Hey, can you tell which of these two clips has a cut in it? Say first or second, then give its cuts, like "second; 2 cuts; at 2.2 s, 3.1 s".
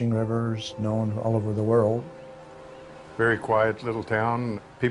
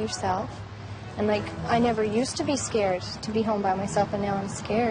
second; 1 cut; at 2.6 s